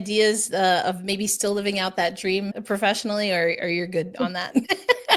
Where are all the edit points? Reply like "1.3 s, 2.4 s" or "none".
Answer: 2.6 s